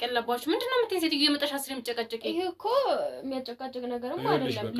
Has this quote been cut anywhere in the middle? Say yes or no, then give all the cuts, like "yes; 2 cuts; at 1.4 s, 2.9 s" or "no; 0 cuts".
no; 0 cuts